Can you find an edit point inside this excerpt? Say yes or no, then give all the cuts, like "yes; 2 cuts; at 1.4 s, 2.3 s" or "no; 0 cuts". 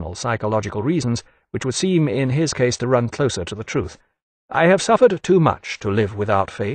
yes; 1 cut; at 5.2 s